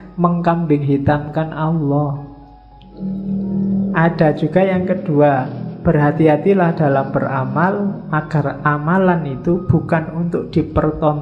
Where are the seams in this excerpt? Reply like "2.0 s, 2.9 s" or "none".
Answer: 2.9 s